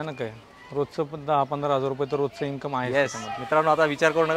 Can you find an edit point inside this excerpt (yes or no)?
no